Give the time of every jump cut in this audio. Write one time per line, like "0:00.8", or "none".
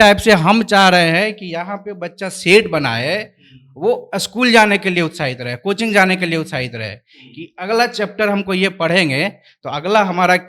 none